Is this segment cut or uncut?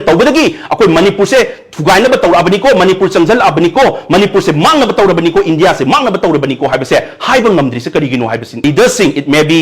cut